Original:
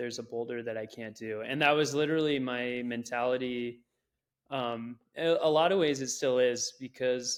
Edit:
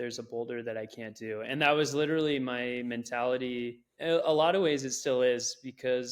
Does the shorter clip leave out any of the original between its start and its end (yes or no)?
yes